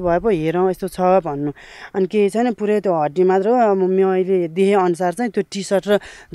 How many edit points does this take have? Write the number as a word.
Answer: zero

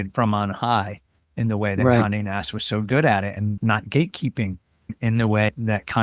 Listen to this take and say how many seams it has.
one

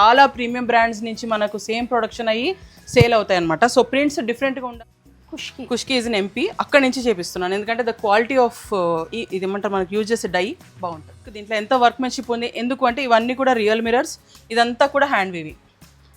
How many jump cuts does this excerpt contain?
two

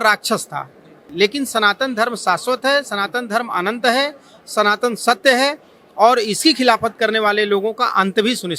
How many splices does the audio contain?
one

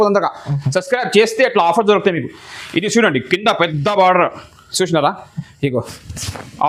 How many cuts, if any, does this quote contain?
zero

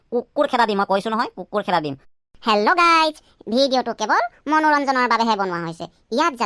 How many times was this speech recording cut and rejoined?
one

